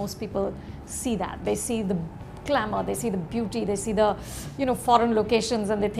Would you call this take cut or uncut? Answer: uncut